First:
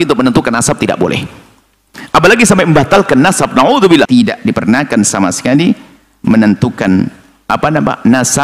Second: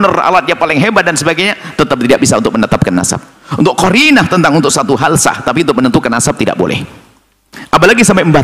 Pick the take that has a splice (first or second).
first